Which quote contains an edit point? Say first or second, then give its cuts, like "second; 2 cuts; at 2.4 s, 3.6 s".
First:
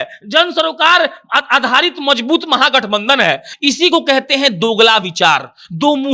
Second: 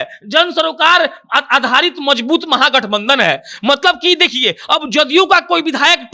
first; 1 cut; at 3.5 s